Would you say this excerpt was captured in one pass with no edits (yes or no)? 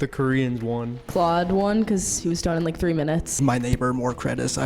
no